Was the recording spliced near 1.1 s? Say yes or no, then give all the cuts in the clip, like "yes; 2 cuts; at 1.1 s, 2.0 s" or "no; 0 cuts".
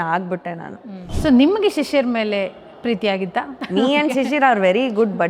yes; 2 cuts; at 1.1 s, 3.6 s